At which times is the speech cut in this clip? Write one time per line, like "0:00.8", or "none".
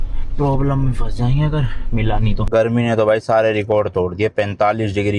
0:02.4